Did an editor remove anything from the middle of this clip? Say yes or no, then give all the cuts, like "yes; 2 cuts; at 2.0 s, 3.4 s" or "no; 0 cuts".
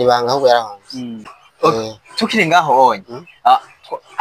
yes; 1 cut; at 1.4 s